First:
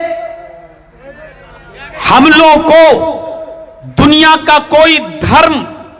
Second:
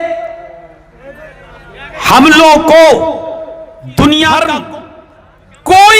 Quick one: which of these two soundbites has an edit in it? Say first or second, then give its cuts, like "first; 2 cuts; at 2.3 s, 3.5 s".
second; 1 cut; at 4.4 s